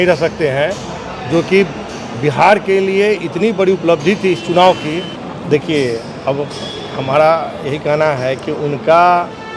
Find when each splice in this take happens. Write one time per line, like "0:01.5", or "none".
0:05.2

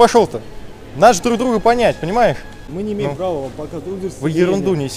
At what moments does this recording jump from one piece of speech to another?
0:02.6

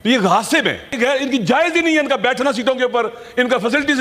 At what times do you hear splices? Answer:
0:00.9

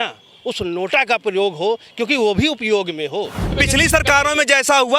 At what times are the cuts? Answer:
0:03.5

